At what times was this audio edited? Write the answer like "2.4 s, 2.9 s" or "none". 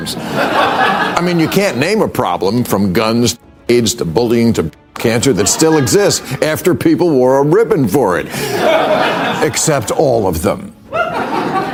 none